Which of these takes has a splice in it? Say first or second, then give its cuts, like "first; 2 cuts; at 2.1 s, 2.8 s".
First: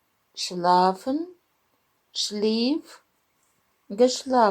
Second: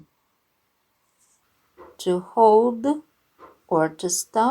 second; 1 cut; at 1.2 s